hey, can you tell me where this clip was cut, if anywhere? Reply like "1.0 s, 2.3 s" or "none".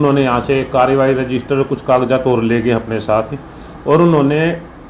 none